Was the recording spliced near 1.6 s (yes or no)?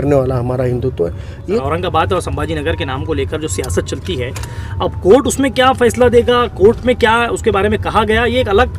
yes